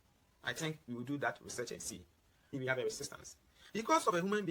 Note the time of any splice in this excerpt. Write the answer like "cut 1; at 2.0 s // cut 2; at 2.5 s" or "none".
cut 1; at 2.5 s

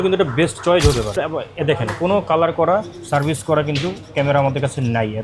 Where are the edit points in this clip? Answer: cut 1; at 1.1 s

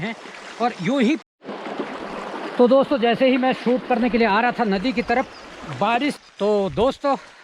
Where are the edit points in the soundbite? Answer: cut 1; at 1.2 s // cut 2; at 6.2 s

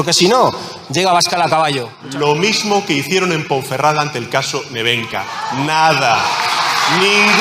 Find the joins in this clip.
cut 1; at 1.9 s

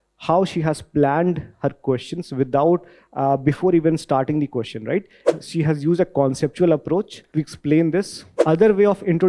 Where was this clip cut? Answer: cut 1; at 5.3 s // cut 2; at 7.2 s // cut 3; at 8.2 s

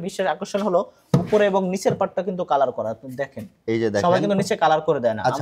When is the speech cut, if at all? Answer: none

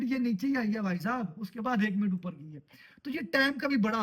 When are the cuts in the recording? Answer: none

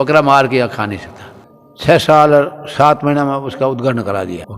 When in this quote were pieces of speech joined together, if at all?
cut 1; at 1.4 s

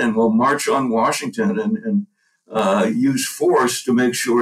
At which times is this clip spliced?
none

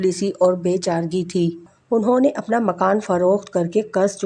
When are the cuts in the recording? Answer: cut 1; at 1.7 s

